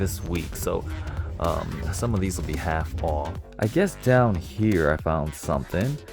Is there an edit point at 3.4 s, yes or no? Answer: yes